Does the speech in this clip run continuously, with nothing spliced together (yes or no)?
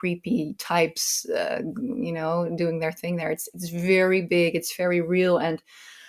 yes